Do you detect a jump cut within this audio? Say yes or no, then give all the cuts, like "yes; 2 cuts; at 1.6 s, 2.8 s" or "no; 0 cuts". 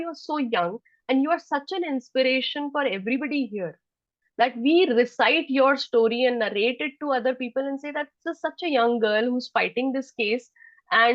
no; 0 cuts